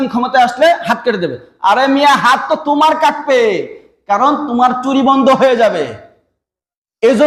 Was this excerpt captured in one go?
yes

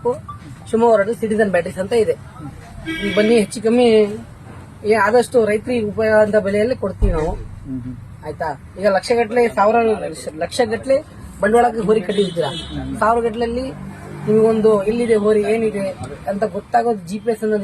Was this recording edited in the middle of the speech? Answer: yes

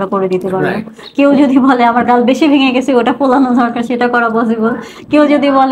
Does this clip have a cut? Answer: no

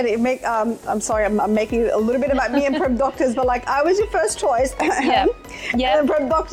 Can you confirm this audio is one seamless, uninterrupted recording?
yes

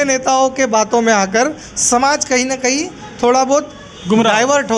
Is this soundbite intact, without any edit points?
yes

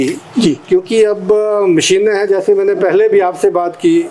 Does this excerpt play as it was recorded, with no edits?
yes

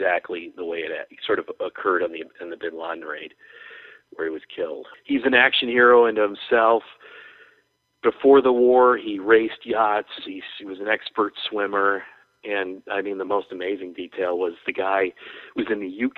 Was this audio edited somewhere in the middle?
yes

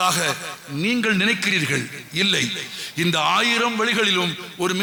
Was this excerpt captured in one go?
yes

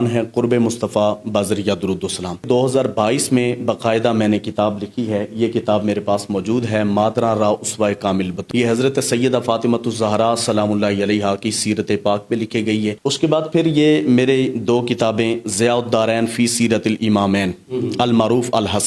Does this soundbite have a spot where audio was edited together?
yes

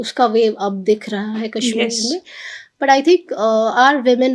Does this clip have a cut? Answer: no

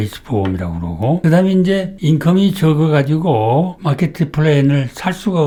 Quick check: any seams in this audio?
no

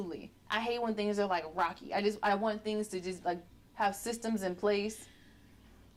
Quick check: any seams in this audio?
no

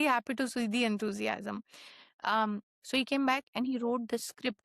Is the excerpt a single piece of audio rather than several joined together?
yes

